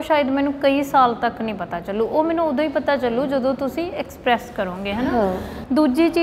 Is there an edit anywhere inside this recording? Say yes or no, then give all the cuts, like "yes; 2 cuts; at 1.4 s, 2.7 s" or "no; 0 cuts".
no; 0 cuts